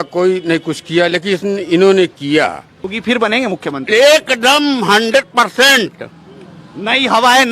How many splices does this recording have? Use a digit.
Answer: 1